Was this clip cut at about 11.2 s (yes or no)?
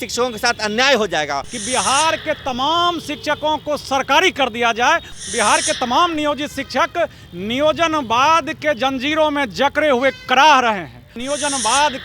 yes